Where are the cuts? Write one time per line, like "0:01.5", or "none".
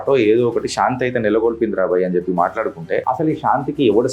0:03.0